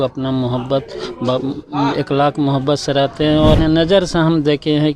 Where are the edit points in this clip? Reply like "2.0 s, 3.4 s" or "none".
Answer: 3.6 s